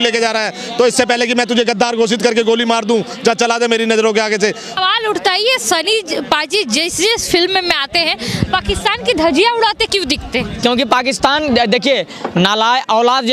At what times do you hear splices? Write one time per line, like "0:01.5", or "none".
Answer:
0:04.8